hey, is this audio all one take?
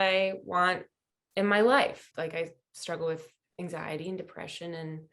no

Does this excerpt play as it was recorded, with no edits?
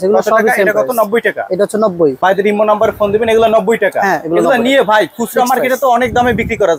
no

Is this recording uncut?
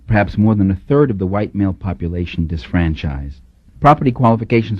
yes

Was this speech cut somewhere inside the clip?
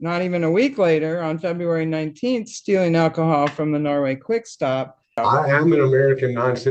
yes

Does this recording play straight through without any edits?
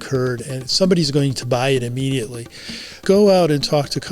no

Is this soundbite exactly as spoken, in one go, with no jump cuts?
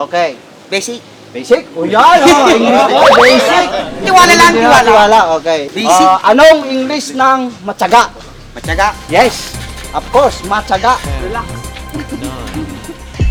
yes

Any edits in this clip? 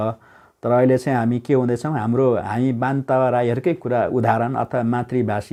no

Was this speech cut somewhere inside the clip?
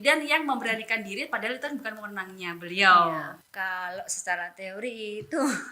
yes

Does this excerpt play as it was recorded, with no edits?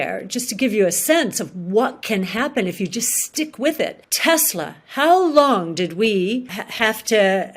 no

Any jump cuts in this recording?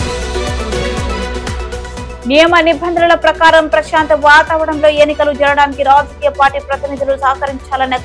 yes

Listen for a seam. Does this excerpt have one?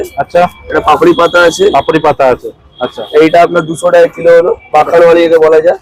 no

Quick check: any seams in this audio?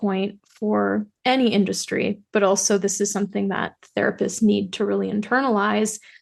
no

